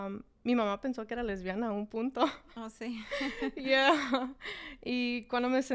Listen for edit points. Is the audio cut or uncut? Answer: uncut